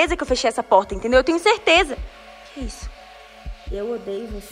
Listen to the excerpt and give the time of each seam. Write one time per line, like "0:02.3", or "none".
none